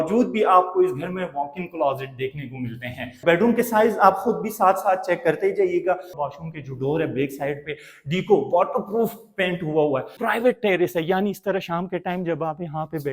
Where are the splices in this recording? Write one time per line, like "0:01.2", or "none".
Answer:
0:03.2
0:06.1
0:10.2